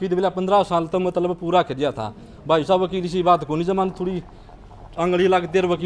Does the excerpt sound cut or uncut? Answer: uncut